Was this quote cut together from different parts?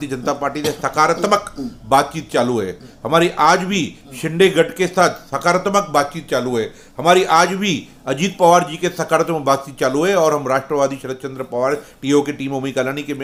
no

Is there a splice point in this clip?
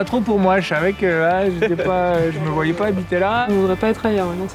yes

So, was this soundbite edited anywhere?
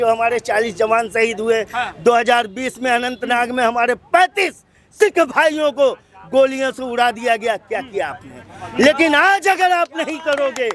no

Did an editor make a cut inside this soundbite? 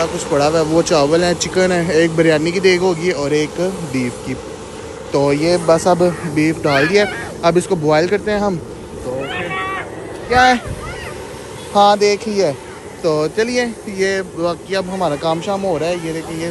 no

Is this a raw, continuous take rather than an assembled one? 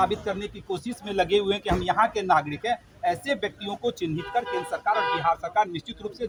yes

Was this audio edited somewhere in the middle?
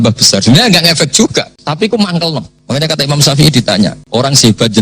yes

